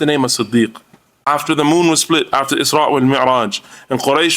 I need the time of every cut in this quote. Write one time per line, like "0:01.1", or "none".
0:01.3

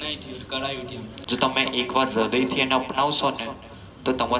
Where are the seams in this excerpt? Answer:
0:01.2

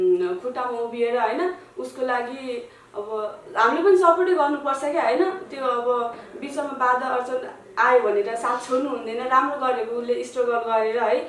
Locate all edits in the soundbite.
none

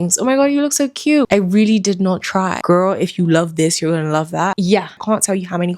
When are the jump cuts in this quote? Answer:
0:01.3
0:02.6
0:04.9

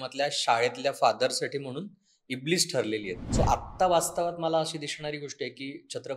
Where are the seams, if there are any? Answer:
0:03.2

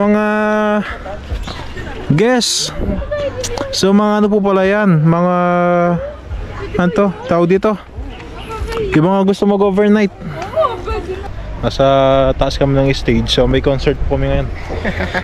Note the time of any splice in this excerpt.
0:11.4

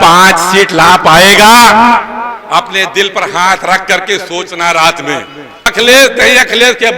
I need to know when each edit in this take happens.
0:05.7

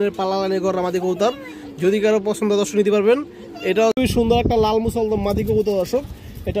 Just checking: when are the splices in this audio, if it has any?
0:03.9

